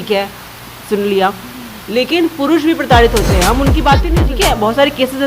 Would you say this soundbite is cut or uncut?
cut